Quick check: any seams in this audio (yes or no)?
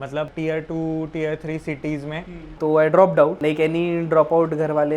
yes